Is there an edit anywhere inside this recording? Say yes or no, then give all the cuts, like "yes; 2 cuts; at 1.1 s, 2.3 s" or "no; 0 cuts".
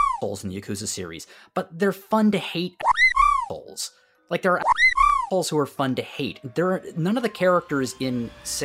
no; 0 cuts